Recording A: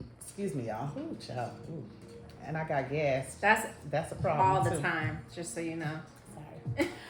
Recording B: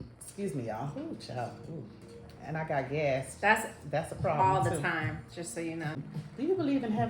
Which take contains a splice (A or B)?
B